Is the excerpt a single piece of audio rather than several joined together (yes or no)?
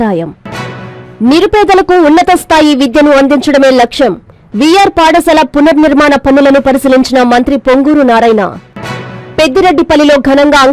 yes